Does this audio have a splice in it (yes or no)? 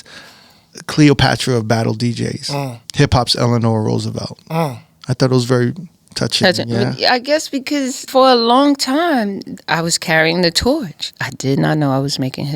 yes